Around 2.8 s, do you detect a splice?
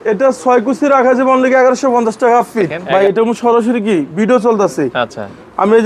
yes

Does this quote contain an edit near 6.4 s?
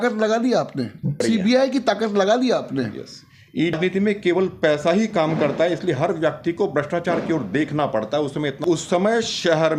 no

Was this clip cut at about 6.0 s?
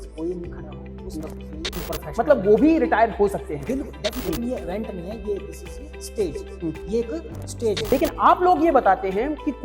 no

